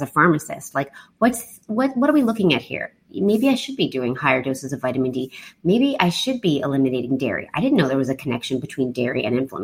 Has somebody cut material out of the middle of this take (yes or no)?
no